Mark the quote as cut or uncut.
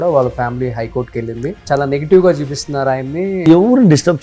cut